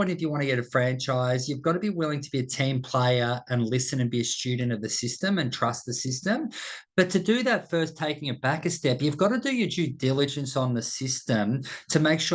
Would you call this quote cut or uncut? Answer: uncut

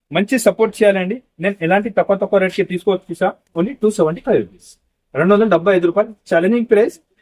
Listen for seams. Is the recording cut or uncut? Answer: uncut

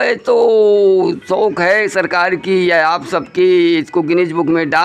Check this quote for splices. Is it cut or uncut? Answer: uncut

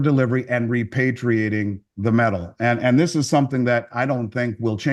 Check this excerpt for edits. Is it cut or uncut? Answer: uncut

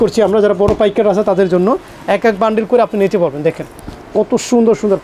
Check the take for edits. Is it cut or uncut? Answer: uncut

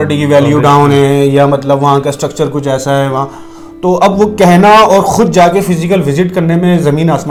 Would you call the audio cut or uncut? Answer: uncut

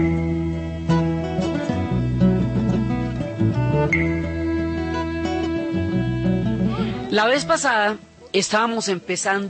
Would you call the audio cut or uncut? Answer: uncut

